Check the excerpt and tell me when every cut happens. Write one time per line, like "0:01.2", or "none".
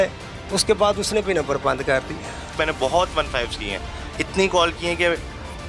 0:02.4